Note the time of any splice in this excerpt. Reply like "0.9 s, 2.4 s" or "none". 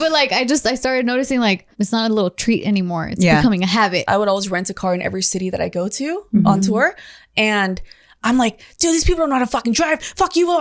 1.7 s, 4.0 s